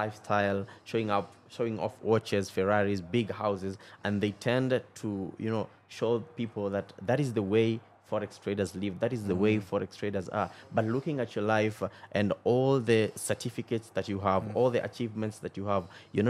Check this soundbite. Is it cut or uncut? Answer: uncut